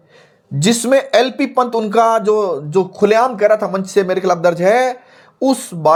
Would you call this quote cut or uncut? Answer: uncut